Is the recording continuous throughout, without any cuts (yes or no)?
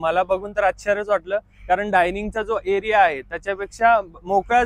yes